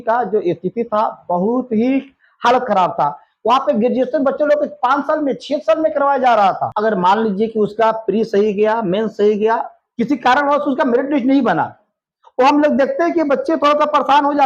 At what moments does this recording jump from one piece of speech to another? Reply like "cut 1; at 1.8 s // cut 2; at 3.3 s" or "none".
cut 1; at 6.7 s